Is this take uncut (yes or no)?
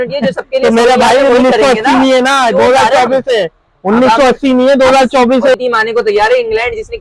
no